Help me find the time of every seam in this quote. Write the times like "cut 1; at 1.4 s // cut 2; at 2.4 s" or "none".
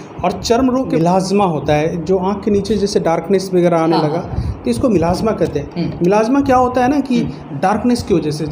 cut 1; at 1.0 s